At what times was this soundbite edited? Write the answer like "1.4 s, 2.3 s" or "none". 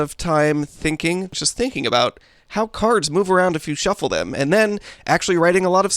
1.3 s